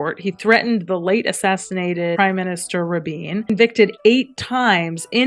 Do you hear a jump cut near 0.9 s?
no; 2 cuts; at 2.1 s, 3.5 s

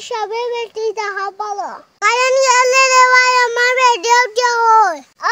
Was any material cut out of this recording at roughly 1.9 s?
yes; 1 cut; at 1.9 s

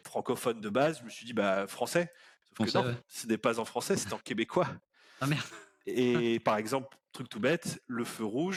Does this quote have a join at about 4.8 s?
no; 0 cuts

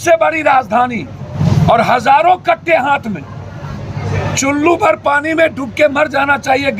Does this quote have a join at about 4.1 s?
yes; 2 cuts; at 1.3 s, 4.1 s

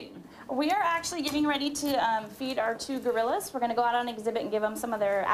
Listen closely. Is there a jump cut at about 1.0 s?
no; 1 cut; at 4.0 s

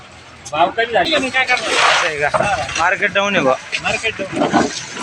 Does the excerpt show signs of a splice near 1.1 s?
yes; 1 cut; at 1.1 s

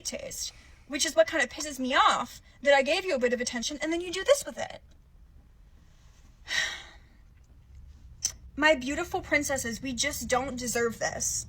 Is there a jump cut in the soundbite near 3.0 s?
yes; 1 cut; at 3.0 s

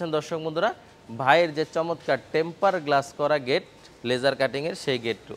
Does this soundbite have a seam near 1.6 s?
no; 0 cuts

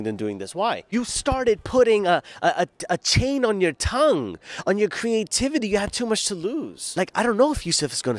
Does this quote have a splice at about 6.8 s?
yes; 2 cuts; at 0.8 s, 6.8 s

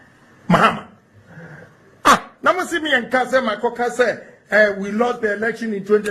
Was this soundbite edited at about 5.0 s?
yes; 1 cut; at 5.0 s

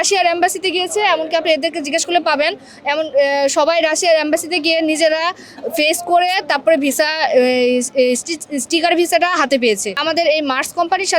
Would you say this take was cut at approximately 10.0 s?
yes; 1 cut; at 10.0 s

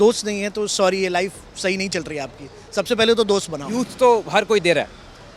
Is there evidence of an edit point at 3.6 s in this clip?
yes; 1 cut; at 3.6 s

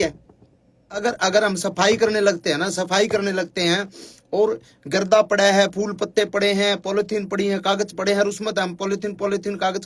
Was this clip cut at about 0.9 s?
yes; 1 cut; at 0.9 s

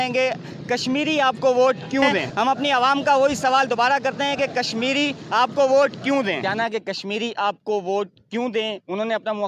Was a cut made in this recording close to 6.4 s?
yes; 2 cuts; at 2.2 s, 6.4 s

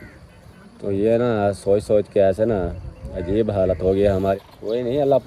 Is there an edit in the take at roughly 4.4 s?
yes; 1 cut; at 4.4 s

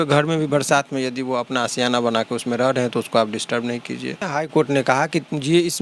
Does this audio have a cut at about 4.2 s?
yes; 1 cut; at 4.2 s

